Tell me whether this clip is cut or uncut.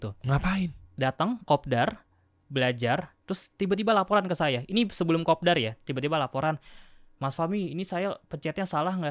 uncut